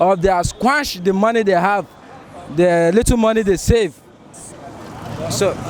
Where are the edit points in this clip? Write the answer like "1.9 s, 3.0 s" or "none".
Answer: none